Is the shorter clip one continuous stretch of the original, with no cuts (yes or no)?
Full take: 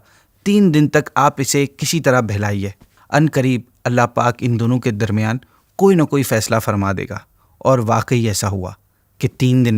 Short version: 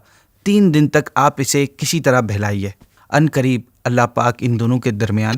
yes